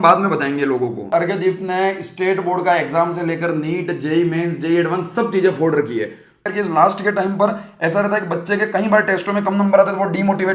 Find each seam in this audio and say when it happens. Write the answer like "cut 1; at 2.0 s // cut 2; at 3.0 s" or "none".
cut 1; at 1.1 s // cut 2; at 6.5 s